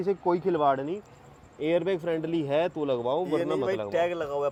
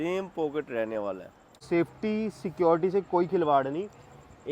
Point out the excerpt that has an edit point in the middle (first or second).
second